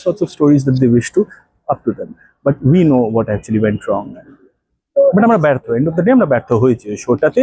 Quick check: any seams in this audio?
no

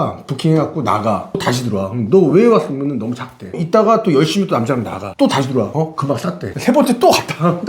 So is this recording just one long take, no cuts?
no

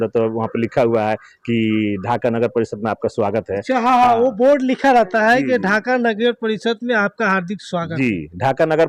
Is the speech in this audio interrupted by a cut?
no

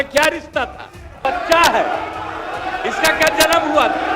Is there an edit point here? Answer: yes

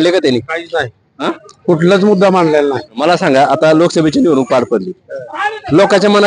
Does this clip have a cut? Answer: yes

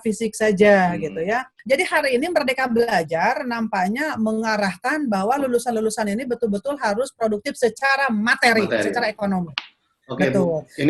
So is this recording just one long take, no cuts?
no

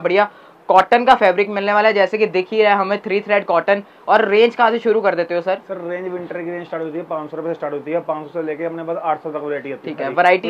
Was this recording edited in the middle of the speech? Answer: no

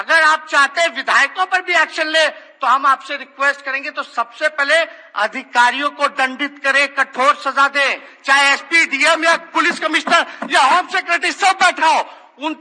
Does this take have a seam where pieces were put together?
no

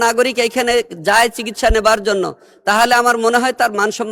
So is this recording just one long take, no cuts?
yes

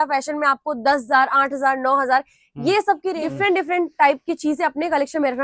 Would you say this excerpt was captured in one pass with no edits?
no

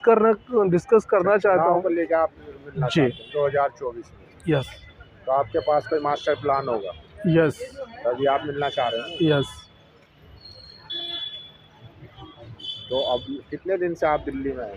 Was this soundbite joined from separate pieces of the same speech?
no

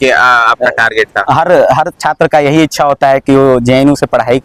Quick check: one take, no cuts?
yes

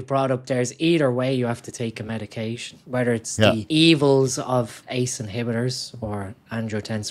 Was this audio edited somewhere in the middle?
yes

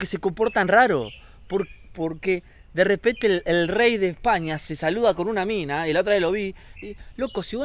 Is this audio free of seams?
yes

